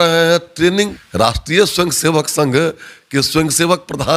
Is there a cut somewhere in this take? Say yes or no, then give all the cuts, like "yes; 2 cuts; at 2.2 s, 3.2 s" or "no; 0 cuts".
yes; 1 cut; at 1.0 s